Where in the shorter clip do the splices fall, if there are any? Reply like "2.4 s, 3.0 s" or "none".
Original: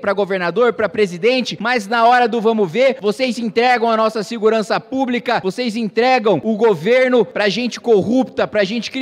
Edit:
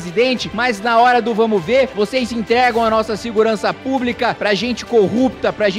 4.4 s